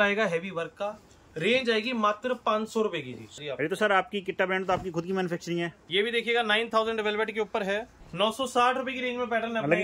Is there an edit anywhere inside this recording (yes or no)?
yes